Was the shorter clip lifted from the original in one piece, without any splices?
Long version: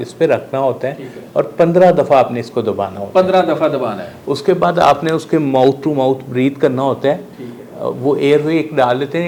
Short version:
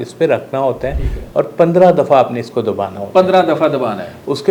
yes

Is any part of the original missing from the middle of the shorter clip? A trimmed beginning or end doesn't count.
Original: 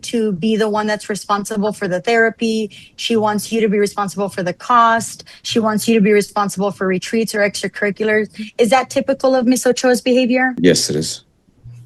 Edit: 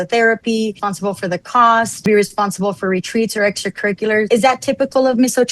yes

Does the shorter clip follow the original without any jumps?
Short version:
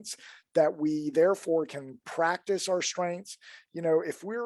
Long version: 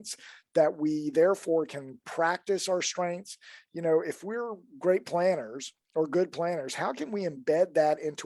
yes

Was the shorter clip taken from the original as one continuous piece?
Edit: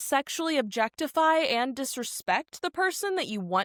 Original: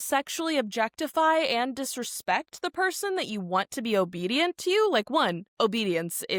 yes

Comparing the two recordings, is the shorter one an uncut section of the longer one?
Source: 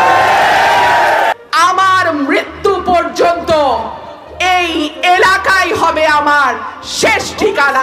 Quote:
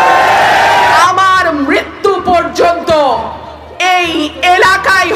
no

